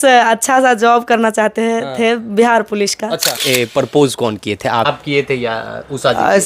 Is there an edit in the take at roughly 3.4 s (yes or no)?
yes